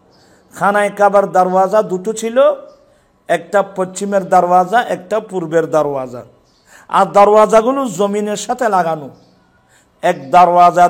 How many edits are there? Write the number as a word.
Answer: zero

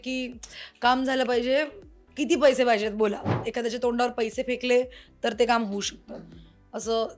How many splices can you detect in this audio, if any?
one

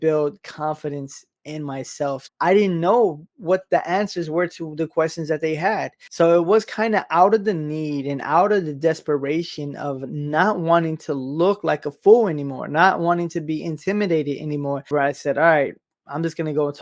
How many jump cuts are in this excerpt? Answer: three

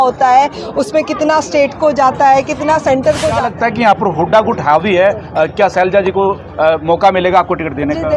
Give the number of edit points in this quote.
one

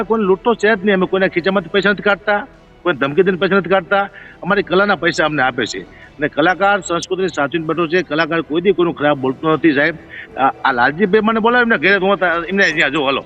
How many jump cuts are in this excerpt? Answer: zero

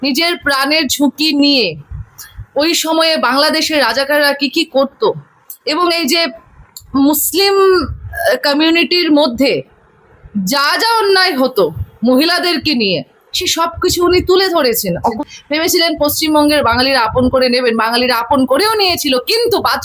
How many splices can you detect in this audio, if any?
one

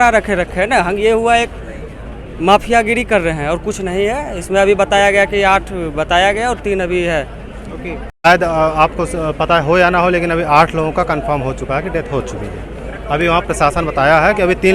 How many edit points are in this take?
one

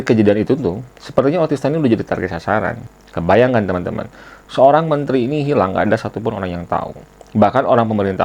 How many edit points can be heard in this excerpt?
one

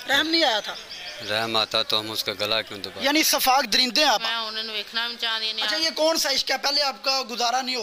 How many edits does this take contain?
one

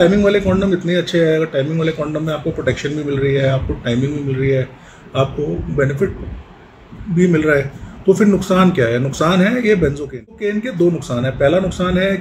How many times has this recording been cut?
one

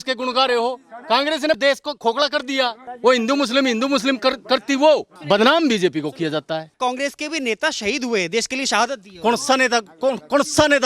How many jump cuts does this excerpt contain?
three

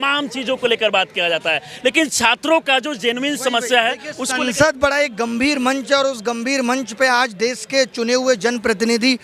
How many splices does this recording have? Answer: zero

